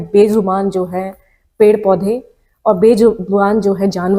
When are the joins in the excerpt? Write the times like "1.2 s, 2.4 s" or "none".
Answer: none